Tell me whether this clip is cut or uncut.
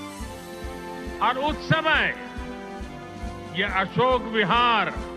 cut